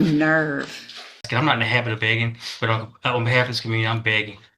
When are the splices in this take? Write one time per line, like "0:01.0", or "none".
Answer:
0:01.3